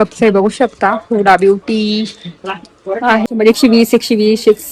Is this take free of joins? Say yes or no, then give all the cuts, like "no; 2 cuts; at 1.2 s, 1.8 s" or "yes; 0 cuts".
no; 1 cut; at 3.2 s